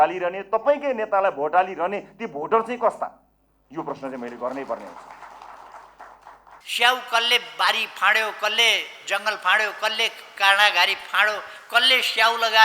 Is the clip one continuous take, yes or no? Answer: no